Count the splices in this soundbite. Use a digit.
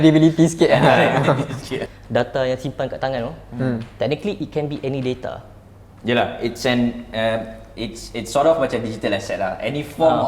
1